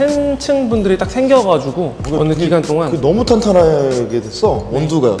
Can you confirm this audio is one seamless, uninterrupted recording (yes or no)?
yes